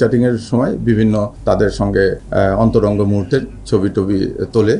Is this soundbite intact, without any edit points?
no; 2 cuts; at 1.3 s, 2.2 s

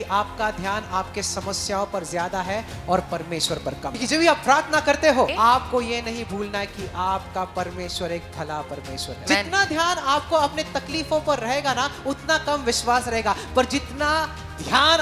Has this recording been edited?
yes; 3 cuts; at 3.9 s, 5.3 s, 9.2 s

